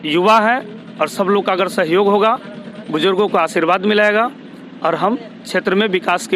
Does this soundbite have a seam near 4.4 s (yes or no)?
no